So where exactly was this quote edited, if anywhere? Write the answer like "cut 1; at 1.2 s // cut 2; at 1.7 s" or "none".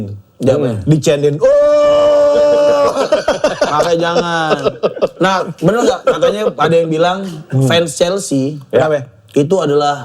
none